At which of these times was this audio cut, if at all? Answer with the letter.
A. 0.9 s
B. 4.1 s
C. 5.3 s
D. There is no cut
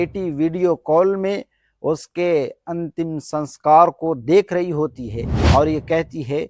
C